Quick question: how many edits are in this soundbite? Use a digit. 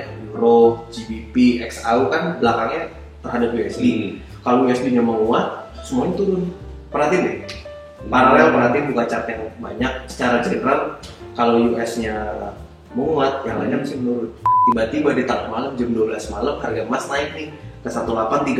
1